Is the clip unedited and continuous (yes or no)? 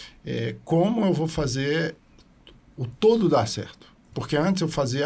yes